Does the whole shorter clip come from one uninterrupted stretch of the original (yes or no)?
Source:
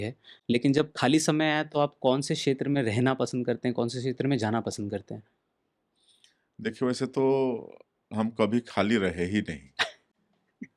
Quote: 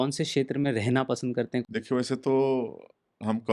no